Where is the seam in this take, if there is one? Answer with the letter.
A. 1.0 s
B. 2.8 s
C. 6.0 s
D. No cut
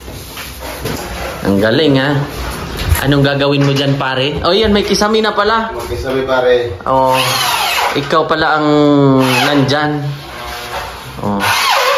A